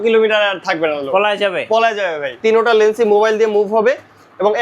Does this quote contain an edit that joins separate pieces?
yes; 1 cut; at 2.4 s

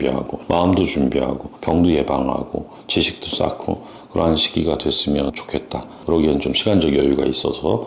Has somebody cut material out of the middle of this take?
no; 0 cuts

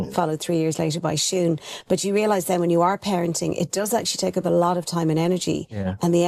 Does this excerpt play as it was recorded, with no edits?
yes; 0 cuts

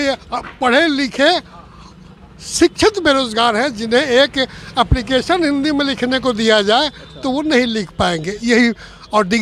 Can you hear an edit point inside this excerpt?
no; 0 cuts

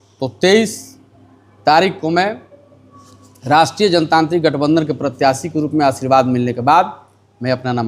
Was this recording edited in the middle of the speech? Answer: no; 0 cuts

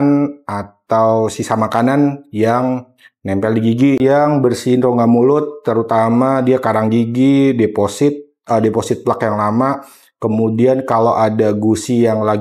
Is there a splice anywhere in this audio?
yes; 1 cut; at 4.0 s

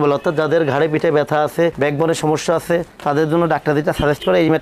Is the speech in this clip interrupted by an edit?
no; 0 cuts

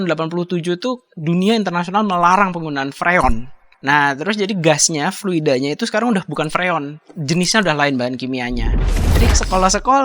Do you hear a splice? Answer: yes; 2 cuts; at 1.1 s, 8.9 s

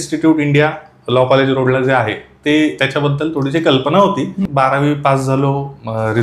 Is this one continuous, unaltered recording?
no; 1 cut; at 4.4 s

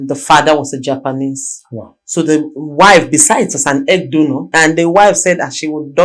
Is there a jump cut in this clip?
yes; 1 cut; at 4.5 s

